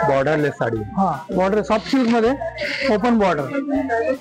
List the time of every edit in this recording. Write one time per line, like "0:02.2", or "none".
none